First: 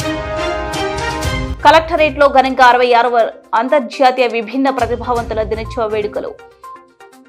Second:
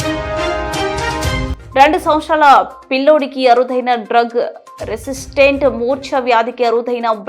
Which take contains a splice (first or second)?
second